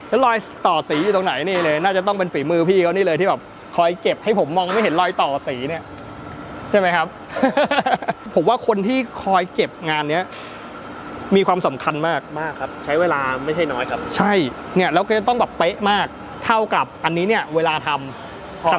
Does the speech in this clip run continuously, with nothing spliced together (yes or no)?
no